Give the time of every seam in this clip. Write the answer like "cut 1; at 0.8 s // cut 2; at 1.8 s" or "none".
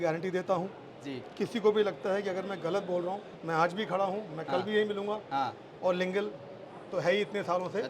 cut 1; at 3.4 s

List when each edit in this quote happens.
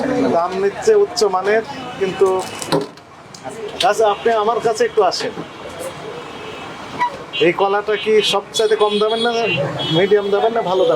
none

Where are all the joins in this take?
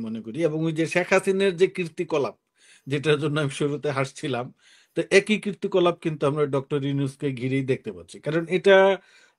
none

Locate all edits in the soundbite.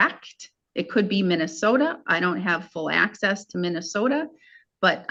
none

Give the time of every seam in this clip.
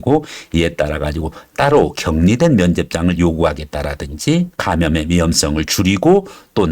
cut 1; at 4.5 s

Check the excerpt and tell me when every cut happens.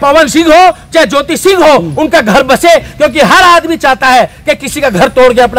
none

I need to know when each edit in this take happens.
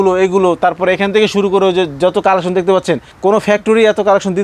cut 1; at 3.1 s

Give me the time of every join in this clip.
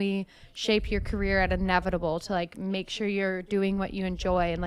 none

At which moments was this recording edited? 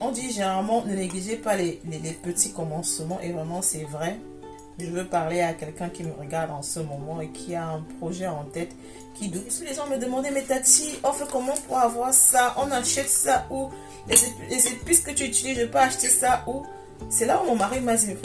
cut 1; at 9.6 s

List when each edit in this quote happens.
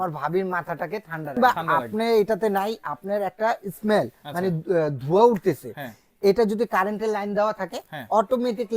cut 1; at 1.4 s

